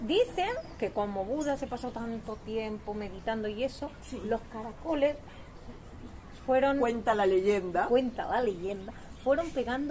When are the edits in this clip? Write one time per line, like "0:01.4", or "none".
none